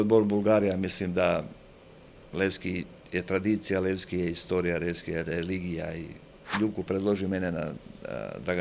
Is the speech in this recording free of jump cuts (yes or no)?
no